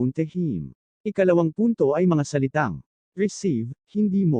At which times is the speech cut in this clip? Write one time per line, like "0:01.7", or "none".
none